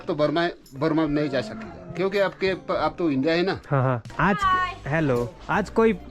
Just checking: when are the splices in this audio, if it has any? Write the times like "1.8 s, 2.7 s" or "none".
4.1 s